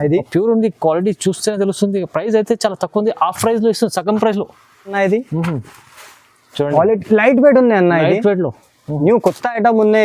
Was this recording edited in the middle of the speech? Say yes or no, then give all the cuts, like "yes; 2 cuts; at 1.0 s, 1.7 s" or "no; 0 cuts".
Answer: yes; 1 cut; at 5.0 s